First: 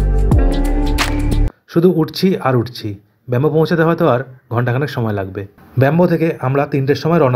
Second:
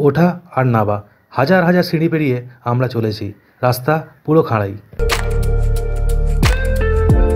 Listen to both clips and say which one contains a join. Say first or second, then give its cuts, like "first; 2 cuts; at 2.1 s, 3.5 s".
first; 2 cuts; at 1.5 s, 5.5 s